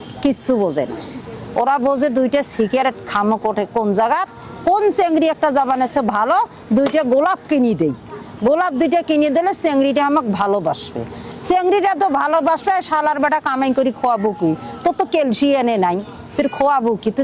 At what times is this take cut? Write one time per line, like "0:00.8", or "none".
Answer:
none